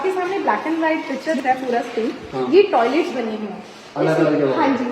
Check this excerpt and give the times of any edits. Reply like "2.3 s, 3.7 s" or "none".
1.4 s

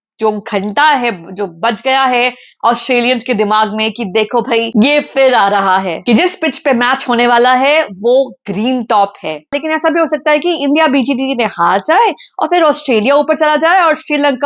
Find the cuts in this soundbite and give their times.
6.0 s, 9.6 s

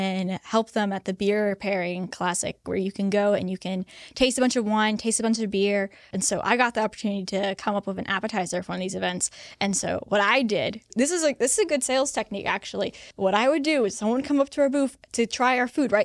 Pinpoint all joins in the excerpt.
2.6 s, 6.1 s, 10.9 s, 13.0 s

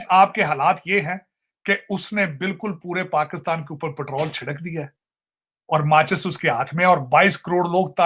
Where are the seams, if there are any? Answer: none

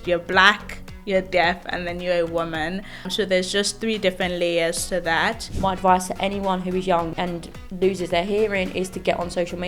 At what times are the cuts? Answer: 3.1 s, 5.5 s, 7.1 s

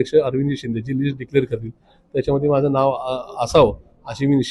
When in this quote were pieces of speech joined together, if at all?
none

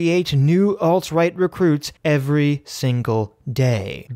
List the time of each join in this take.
none

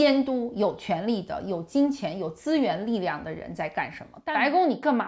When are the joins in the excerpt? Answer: 4.0 s

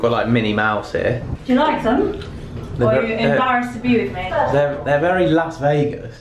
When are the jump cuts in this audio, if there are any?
1.3 s

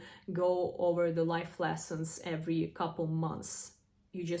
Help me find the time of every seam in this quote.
none

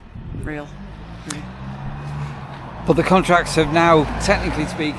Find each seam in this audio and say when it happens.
none

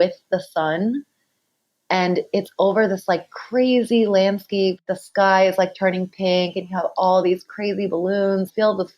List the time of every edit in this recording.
4.8 s

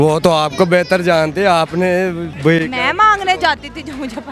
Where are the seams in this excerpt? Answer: none

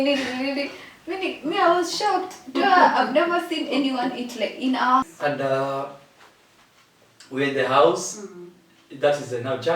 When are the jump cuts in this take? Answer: 5.0 s

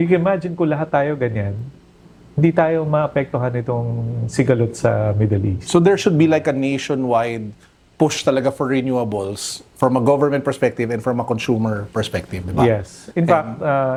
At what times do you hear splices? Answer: none

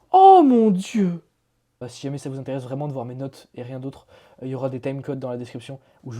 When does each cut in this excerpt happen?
1.8 s

